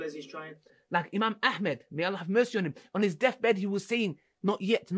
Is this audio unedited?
no; 1 cut; at 1.2 s

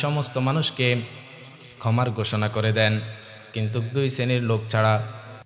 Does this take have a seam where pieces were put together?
no; 0 cuts

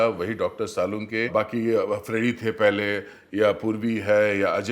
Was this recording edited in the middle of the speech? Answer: yes; 1 cut; at 1.3 s

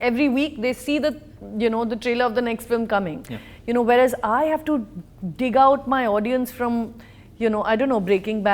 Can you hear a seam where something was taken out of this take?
no; 0 cuts

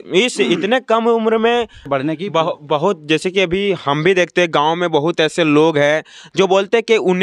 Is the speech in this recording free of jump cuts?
no; 1 cut; at 2.1 s

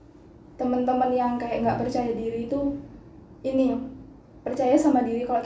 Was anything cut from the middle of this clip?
no; 0 cuts

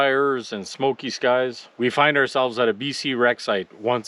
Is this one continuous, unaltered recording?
no; 1 cut; at 1.6 s

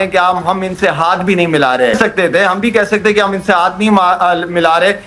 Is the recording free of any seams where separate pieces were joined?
no; 1 cut; at 2.0 s

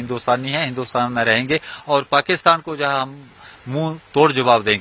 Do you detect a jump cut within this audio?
no; 0 cuts

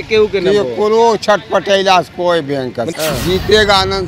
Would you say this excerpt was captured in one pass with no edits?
no; 1 cut; at 2.9 s

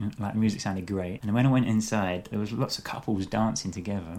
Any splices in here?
yes; 2 cuts; at 1.2 s, 2.3 s

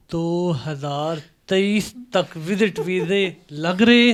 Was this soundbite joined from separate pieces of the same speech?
no; 0 cuts

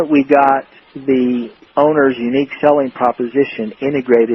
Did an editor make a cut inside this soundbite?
yes; 1 cut; at 1.6 s

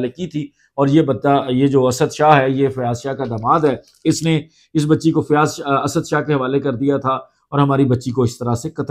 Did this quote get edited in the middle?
no; 0 cuts

